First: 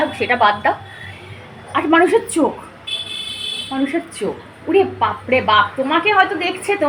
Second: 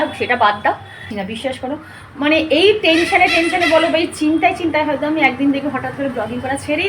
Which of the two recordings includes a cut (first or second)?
second